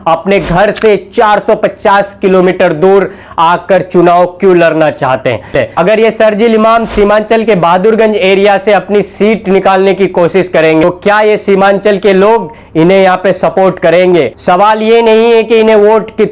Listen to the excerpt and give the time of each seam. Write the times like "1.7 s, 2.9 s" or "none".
5.5 s, 10.8 s, 14.4 s